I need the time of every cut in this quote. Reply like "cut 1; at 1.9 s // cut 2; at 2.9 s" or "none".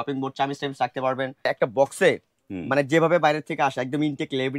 cut 1; at 1.5 s